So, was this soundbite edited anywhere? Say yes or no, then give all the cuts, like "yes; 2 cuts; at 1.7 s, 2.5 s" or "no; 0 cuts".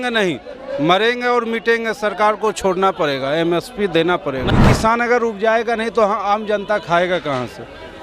yes; 1 cut; at 4.5 s